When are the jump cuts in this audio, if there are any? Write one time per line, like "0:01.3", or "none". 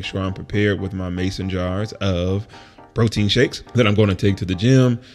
0:03.6